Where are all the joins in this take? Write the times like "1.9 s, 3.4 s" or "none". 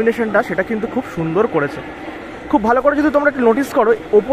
none